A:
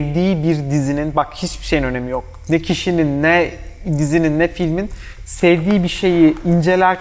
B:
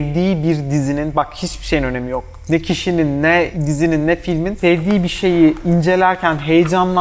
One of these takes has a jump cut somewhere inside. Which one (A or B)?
B